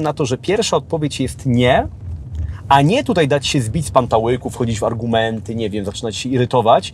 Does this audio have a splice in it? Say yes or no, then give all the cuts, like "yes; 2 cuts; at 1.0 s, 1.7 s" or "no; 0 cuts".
no; 0 cuts